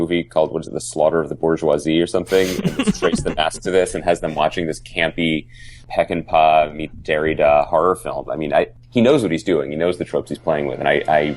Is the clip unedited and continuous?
no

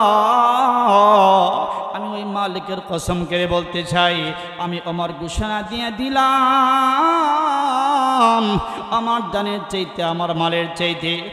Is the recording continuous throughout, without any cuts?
yes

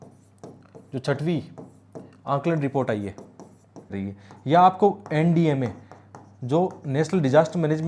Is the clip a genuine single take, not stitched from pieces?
no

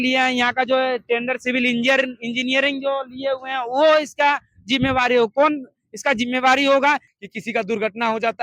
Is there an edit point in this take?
yes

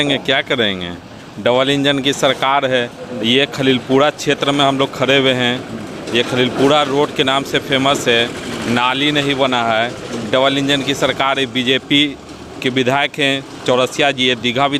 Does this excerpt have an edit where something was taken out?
no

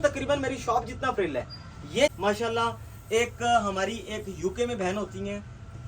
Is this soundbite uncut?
no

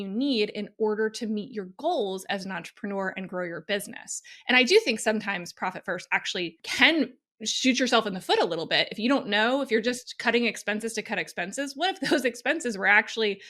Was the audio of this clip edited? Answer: yes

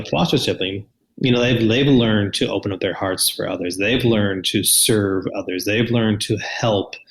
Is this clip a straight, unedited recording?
no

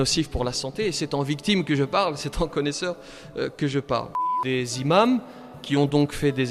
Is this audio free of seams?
no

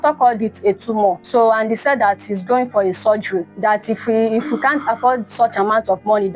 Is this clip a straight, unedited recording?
no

